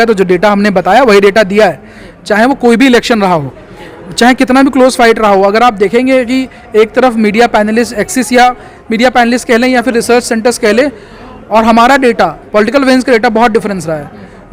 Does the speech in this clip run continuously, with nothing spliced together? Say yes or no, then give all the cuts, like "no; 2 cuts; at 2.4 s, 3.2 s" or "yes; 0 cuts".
yes; 0 cuts